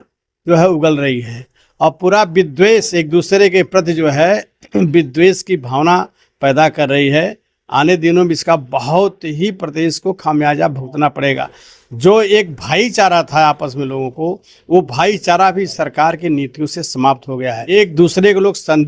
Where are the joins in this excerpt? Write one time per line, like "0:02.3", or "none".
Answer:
0:17.7